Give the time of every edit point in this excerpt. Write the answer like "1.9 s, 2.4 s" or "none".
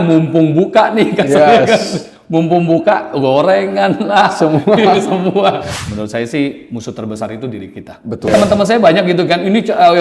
5.7 s, 8.3 s